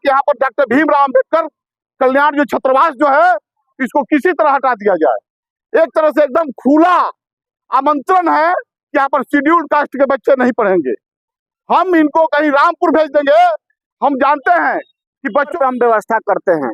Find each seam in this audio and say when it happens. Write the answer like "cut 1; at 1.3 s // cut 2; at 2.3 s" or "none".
cut 1; at 15.5 s